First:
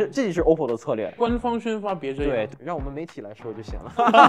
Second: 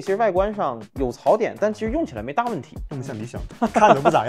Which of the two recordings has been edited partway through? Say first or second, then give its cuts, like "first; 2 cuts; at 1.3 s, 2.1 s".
first; 2 cuts; at 1.1 s, 2.5 s